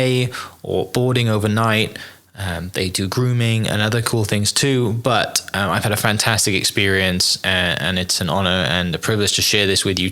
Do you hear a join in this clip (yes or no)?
no